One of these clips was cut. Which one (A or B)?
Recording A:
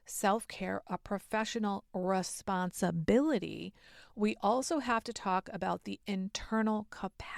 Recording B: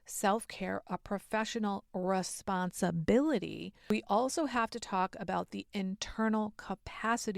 B